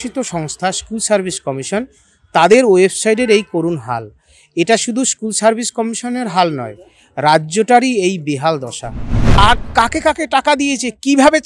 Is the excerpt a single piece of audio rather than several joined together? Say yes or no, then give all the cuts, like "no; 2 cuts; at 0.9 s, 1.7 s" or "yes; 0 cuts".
no; 1 cut; at 9.4 s